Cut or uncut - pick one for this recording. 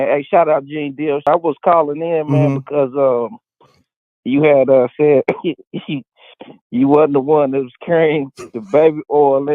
cut